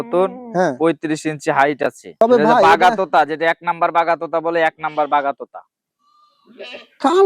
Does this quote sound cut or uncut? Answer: cut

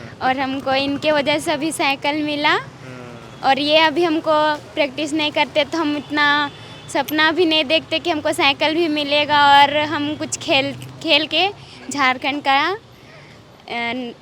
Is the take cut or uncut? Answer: uncut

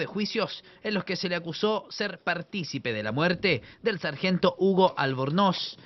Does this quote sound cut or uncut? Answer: cut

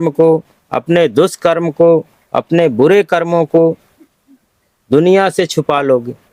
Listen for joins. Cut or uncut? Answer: uncut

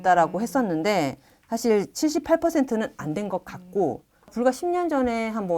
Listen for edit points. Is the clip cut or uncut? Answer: cut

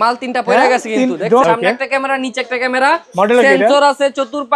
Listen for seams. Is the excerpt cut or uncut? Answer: cut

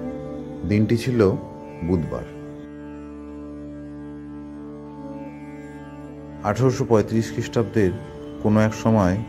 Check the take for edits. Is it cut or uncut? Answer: uncut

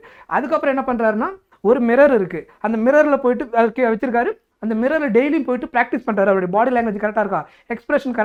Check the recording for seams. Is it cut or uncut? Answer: uncut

